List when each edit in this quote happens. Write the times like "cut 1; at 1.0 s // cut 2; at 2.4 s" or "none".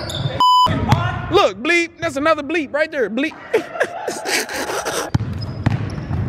cut 1; at 5.1 s